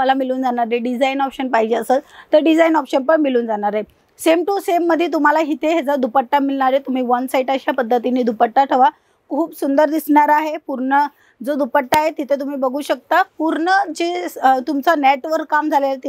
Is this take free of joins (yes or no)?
yes